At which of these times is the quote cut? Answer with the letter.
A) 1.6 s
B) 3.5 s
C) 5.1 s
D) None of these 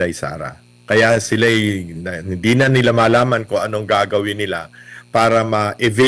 D